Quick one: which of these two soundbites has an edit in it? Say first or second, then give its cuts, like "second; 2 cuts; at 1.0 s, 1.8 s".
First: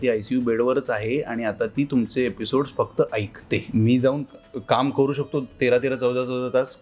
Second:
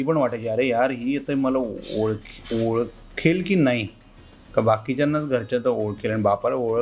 first; 1 cut; at 3.7 s